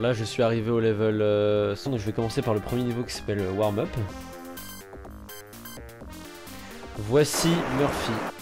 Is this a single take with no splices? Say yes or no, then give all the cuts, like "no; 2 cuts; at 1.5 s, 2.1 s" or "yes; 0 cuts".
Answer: yes; 0 cuts